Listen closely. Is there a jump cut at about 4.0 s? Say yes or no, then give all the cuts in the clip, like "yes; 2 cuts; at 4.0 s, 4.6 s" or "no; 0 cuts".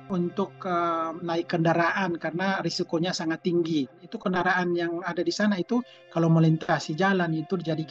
yes; 2 cuts; at 4.0 s, 6.0 s